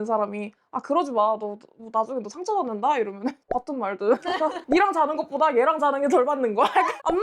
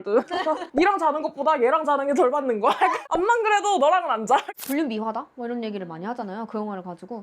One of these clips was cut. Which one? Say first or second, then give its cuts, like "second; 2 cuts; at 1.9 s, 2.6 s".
second; 1 cut; at 4.5 s